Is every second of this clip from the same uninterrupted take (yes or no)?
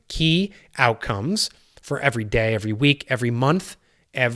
yes